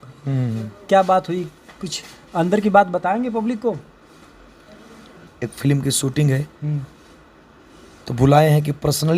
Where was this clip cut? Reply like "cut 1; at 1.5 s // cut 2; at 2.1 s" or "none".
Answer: cut 1; at 5.3 s